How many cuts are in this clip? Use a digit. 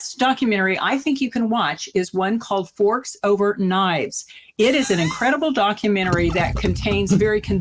0